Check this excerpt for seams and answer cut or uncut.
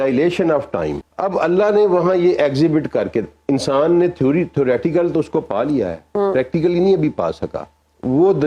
cut